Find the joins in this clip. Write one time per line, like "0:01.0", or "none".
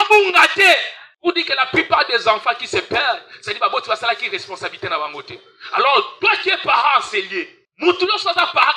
none